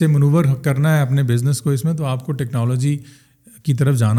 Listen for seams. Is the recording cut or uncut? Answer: uncut